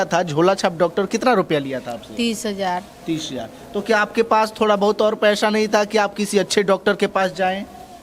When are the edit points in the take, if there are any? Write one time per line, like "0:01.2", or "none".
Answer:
none